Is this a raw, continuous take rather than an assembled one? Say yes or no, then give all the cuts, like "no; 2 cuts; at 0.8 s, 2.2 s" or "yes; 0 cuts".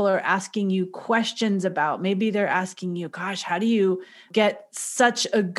no; 1 cut; at 4.3 s